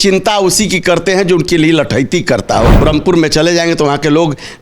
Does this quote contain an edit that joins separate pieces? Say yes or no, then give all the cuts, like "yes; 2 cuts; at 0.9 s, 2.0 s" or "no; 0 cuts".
yes; 1 cut; at 2.7 s